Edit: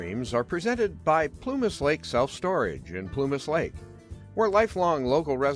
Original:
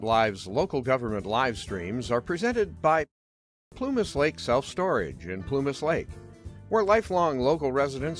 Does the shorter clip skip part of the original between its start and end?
yes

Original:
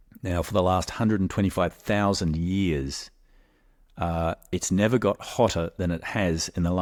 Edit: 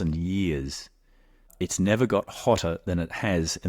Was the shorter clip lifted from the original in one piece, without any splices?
no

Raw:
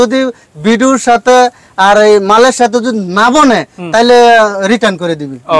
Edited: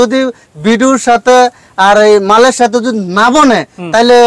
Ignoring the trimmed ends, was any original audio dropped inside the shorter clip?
no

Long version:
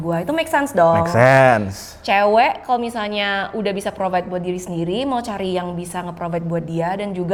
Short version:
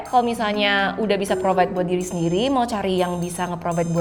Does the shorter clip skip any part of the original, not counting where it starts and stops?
no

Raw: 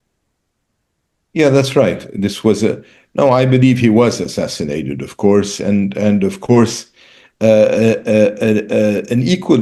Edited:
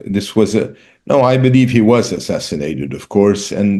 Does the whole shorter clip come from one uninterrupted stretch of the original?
yes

